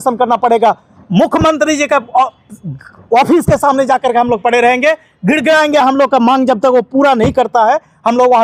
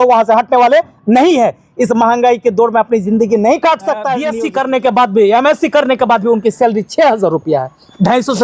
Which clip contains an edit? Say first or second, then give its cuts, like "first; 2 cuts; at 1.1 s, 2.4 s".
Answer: second; 1 cut; at 4.3 s